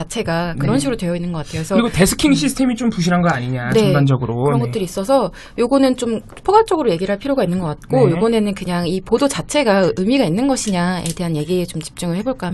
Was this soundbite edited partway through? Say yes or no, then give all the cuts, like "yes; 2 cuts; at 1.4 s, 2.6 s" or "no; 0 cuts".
yes; 1 cut; at 11.2 s